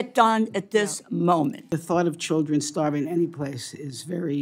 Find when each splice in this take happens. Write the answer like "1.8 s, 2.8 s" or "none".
1.7 s